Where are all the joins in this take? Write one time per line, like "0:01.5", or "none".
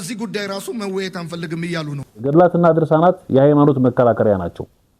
0:02.2